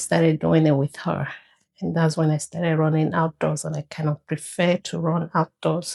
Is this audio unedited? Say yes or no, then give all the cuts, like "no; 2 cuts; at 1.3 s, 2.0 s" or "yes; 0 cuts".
yes; 0 cuts